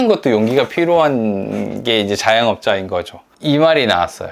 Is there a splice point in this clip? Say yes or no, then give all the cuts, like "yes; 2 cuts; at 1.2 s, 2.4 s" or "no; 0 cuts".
yes; 1 cut; at 3.3 s